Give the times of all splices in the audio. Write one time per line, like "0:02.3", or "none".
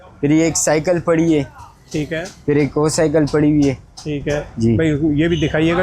none